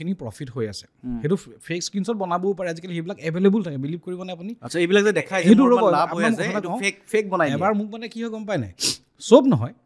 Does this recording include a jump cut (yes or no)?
no